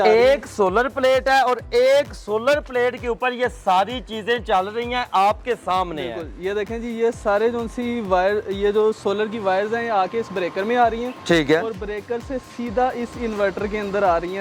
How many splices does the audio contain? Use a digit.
0